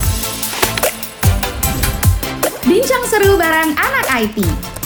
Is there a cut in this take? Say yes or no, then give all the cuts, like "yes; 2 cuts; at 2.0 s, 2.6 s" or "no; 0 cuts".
no; 0 cuts